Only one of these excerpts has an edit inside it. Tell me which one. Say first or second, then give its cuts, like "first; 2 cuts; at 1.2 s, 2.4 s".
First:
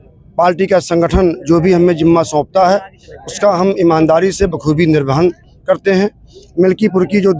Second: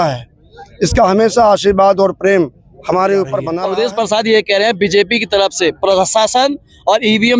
second; 1 cut; at 3.5 s